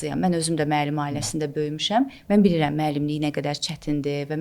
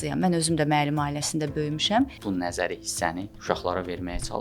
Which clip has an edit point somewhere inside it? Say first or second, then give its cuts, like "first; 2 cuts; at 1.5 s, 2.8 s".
second; 2 cuts; at 2.2 s, 3.3 s